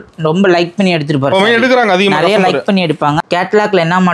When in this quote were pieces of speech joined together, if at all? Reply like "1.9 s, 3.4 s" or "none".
3.2 s